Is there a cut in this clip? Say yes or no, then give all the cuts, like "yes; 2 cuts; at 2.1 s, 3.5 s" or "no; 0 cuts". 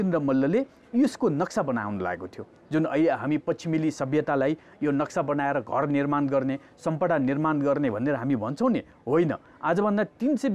no; 0 cuts